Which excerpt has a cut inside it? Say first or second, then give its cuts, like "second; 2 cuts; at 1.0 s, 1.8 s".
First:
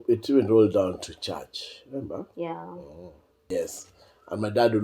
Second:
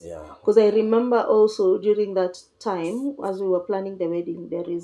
first; 1 cut; at 3.5 s